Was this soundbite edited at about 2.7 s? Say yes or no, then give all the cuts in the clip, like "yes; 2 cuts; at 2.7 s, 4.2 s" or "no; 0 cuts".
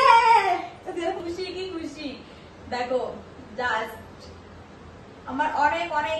no; 1 cut; at 1.2 s